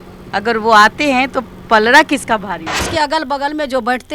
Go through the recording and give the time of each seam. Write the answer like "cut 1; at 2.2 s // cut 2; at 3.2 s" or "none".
cut 1; at 2.9 s

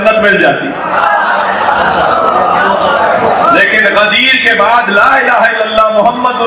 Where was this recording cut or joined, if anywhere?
cut 1; at 2.2 s

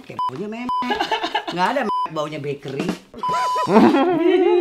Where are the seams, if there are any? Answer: cut 1; at 3.7 s

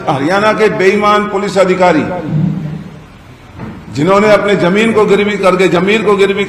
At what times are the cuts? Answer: none

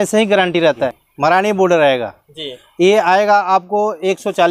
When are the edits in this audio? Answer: cut 1; at 1.0 s

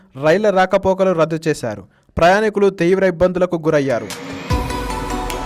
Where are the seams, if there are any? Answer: cut 1; at 4.2 s

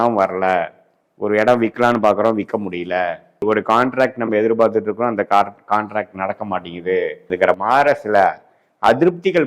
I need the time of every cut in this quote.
cut 1; at 7.2 s

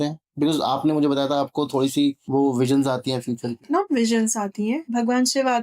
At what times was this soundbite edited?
cut 1; at 2.2 s // cut 2; at 3.6 s // cut 3; at 4.8 s

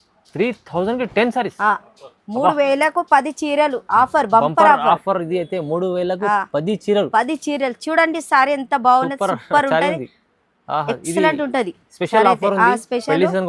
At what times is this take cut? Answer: none

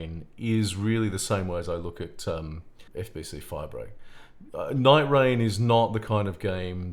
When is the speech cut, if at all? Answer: cut 1; at 2.7 s

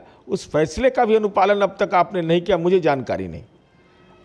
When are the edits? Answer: none

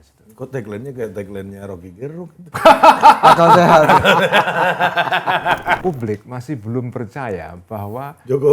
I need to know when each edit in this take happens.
cut 1; at 5.8 s

